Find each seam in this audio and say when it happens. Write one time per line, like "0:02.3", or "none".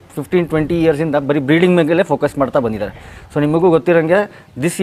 none